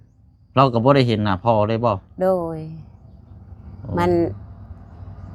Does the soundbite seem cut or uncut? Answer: uncut